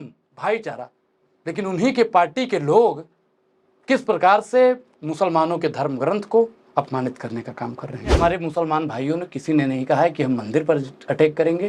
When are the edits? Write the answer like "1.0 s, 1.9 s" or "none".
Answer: 8.2 s